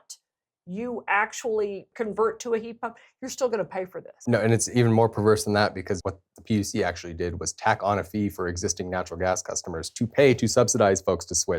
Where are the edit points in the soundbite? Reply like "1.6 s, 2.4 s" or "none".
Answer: 1.9 s, 4.1 s, 6.0 s